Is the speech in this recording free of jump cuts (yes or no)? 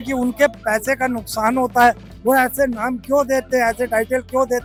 yes